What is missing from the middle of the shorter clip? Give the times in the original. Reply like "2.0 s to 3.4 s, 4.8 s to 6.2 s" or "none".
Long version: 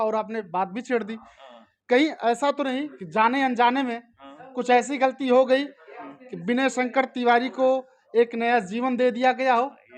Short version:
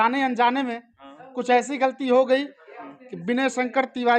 none

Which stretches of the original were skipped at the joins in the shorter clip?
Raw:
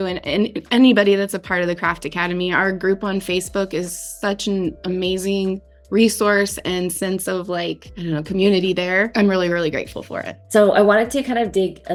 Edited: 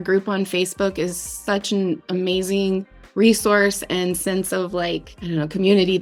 none

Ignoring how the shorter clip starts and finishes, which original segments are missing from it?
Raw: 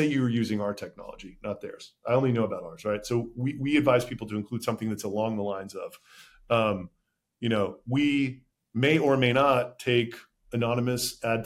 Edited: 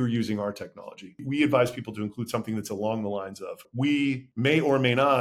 1.3 s to 3.4 s, 6.0 s to 7.8 s, 8.4 s to 8.6 s

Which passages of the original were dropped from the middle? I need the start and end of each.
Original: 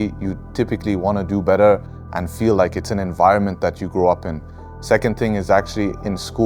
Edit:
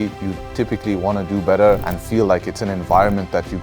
1.9 s to 2.2 s

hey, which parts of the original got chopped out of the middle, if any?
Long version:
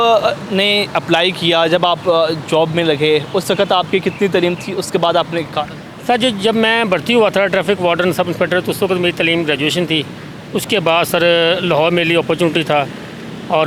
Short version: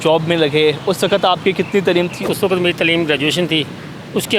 4.7 s to 8.6 s

